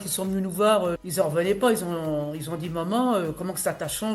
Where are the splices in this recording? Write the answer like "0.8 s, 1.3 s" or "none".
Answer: 1.0 s